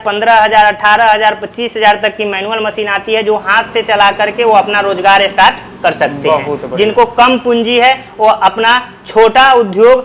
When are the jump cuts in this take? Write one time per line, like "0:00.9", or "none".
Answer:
none

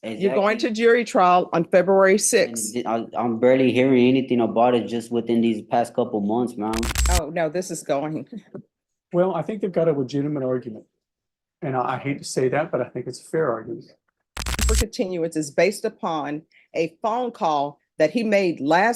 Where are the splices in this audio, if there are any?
0:07.0
0:14.6

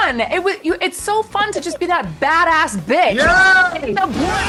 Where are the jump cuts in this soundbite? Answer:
none

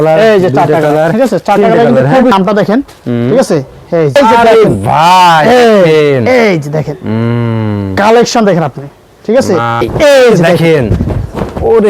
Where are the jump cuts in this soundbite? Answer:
0:02.3
0:04.2
0:09.8

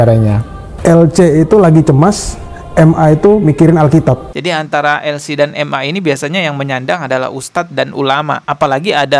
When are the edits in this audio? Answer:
0:04.3

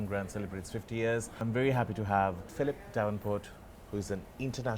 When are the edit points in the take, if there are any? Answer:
0:01.4
0:02.5

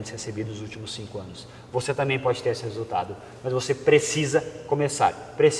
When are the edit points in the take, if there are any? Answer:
none

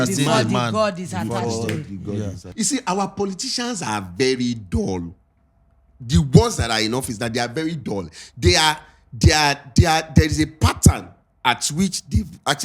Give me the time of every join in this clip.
0:02.4

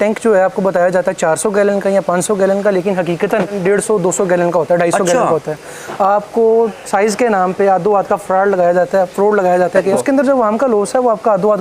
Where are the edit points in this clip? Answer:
0:03.6
0:09.9

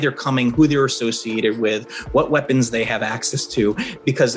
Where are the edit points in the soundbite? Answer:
none

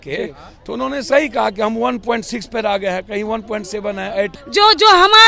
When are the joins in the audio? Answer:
0:04.4

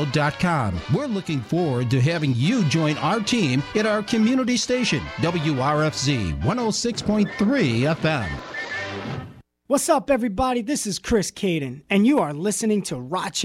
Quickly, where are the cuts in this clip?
0:09.6

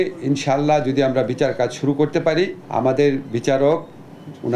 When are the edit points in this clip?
0:02.6

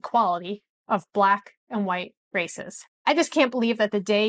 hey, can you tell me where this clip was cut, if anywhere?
0:02.9

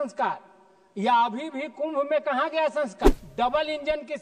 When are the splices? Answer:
0:03.1

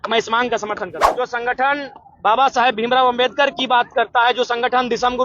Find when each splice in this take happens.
0:01.0

